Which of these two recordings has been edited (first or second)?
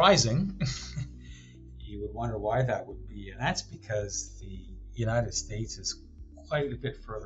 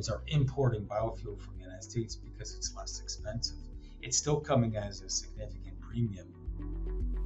second